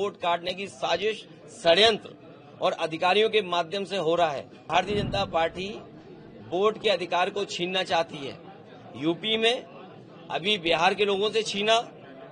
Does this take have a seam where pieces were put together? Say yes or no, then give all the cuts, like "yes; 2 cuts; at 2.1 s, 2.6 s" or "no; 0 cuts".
yes; 1 cut; at 4.7 s